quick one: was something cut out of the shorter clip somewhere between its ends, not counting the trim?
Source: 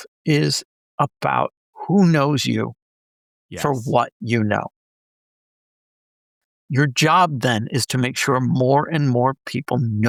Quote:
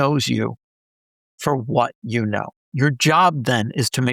yes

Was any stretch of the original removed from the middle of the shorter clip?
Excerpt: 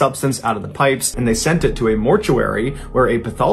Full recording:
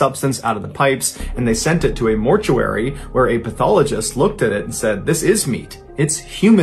yes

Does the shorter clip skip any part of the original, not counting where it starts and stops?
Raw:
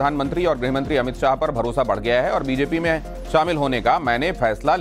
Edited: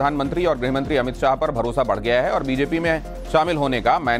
no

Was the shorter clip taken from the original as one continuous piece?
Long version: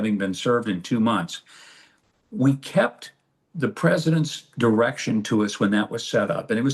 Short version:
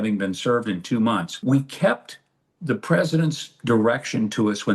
no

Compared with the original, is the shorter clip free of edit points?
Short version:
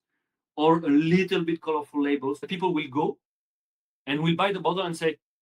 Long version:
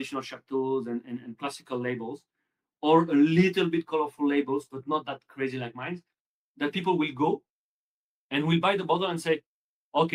no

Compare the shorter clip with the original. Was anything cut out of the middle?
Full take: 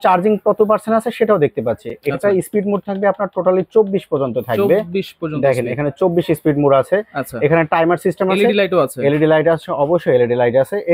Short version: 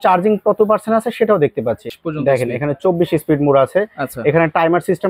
yes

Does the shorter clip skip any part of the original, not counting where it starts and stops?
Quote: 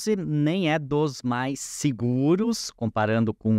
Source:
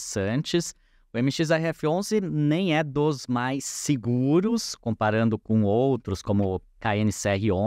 no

